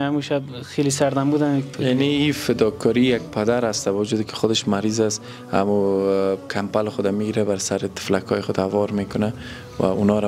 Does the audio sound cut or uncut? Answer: cut